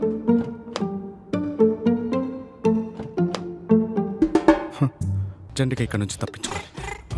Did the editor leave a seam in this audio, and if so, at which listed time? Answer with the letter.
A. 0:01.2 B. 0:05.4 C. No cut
B